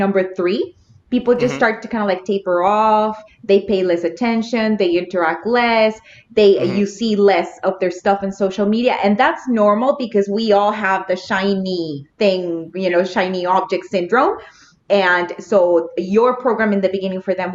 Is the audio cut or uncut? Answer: uncut